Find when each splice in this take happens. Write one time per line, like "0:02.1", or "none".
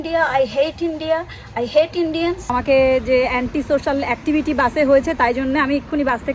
0:02.5